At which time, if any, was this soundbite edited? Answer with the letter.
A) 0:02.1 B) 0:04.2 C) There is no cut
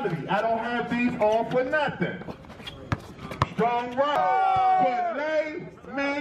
B